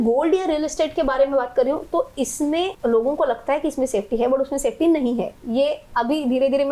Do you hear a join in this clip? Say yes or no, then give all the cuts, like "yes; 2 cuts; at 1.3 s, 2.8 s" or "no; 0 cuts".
yes; 1 cut; at 2.7 s